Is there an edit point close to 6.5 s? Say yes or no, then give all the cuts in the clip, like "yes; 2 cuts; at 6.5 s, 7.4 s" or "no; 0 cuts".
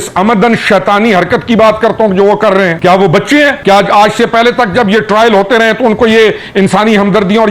no; 2 cuts; at 2.8 s, 3.6 s